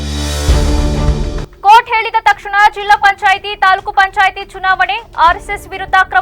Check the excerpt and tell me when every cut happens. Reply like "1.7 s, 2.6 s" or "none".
1.5 s